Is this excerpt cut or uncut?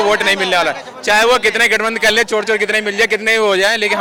uncut